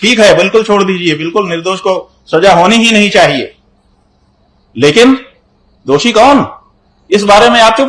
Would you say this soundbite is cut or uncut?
uncut